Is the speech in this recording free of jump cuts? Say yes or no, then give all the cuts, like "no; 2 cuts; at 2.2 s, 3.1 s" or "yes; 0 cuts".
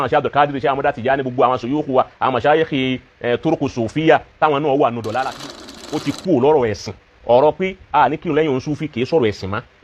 no; 1 cut; at 5.4 s